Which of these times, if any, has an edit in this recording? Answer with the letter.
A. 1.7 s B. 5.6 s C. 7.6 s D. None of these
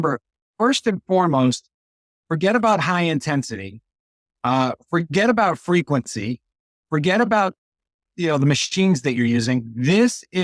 D